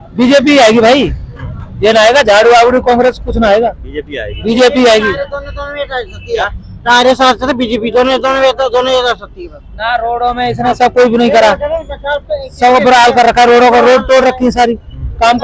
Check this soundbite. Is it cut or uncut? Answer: uncut